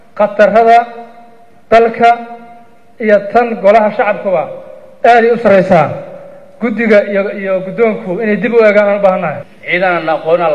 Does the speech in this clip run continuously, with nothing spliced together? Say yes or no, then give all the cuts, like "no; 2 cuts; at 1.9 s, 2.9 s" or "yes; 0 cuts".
no; 1 cut; at 9.3 s